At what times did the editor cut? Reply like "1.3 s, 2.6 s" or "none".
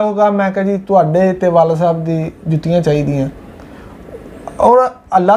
none